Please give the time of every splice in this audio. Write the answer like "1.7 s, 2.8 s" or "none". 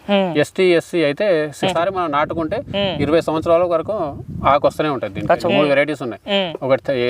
1.6 s, 5.3 s